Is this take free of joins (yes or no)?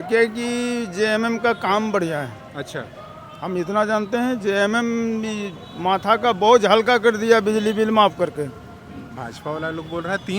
yes